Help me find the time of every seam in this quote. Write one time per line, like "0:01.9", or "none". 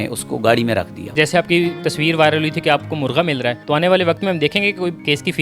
0:01.1